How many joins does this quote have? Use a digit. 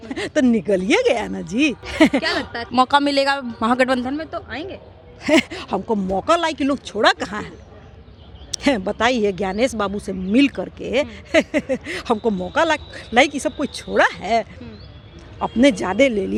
0